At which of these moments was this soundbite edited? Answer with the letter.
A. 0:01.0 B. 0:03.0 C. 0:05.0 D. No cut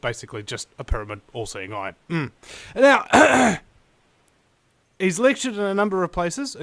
B